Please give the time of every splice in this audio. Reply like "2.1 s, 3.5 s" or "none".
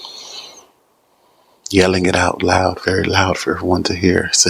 none